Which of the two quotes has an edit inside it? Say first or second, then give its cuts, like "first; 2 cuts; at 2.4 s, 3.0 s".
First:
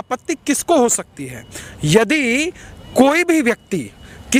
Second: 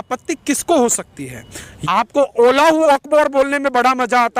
second; 1 cut; at 1.7 s